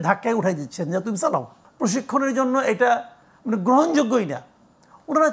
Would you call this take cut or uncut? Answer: cut